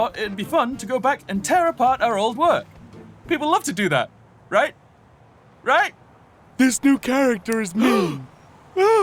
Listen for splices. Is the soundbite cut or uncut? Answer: uncut